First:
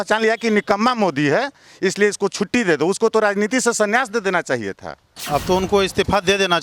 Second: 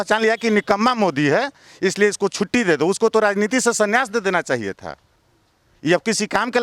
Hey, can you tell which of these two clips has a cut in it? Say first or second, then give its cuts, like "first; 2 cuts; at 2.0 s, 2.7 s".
first; 1 cut; at 5.1 s